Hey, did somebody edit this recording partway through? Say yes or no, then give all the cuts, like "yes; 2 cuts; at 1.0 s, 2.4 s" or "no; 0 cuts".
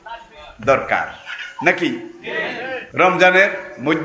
yes; 1 cut; at 2.8 s